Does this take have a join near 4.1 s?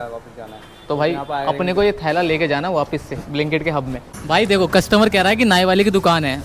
yes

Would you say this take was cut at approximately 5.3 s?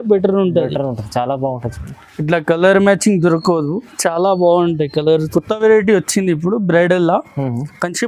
yes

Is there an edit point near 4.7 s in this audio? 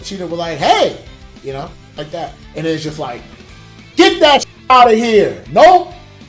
no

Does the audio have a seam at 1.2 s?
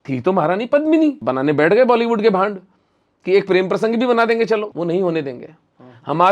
yes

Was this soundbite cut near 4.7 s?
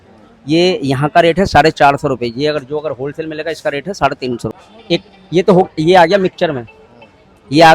yes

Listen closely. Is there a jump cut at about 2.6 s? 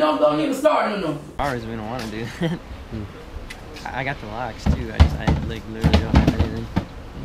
no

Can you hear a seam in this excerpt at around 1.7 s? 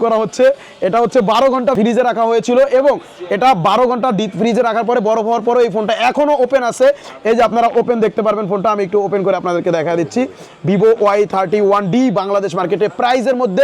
yes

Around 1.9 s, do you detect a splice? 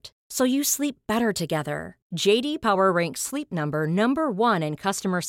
no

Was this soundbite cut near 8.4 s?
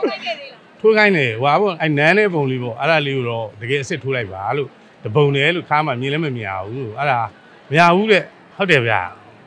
yes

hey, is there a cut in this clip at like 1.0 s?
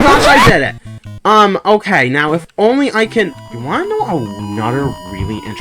no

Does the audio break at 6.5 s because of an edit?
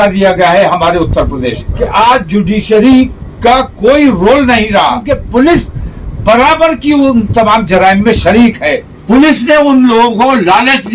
no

